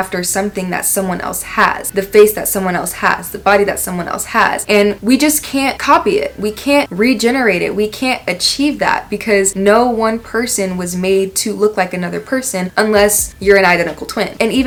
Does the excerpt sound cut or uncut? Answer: uncut